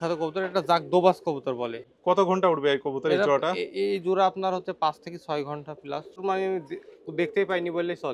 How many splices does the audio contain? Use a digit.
2